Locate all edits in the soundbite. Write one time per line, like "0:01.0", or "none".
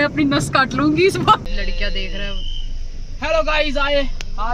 0:01.6